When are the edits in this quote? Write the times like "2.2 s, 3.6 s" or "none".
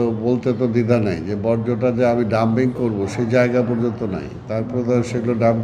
none